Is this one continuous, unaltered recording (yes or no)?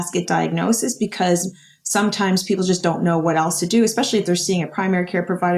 yes